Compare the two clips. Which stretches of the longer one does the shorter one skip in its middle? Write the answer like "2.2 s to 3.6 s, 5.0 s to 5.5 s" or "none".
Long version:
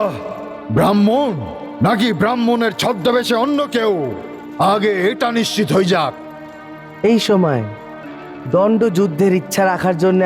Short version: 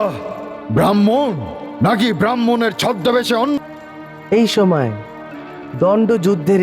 3.6 s to 6.3 s